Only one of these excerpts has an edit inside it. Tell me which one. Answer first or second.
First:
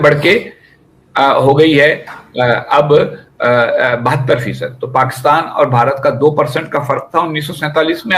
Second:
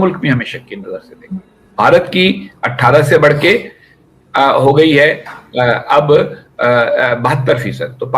second